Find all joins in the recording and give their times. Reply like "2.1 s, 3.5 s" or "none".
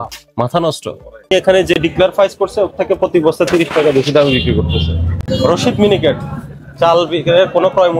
1.3 s, 5.2 s

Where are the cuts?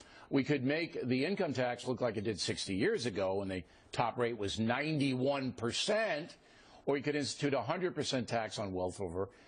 3.5 s

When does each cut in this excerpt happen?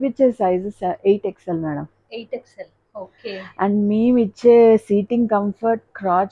none

